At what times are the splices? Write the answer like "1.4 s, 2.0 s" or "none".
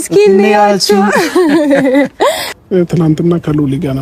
2.5 s